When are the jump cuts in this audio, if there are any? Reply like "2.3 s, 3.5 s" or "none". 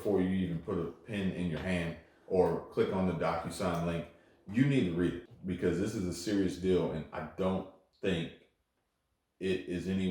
5.3 s